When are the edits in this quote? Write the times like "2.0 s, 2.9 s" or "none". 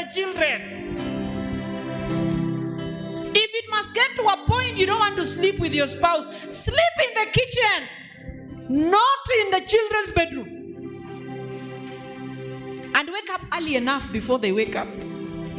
none